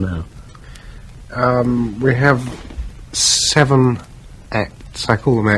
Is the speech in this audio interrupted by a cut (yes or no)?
no